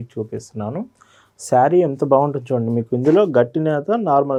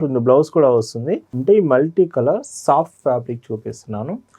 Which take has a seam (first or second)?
second